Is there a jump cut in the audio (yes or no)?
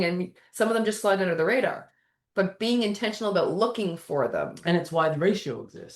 no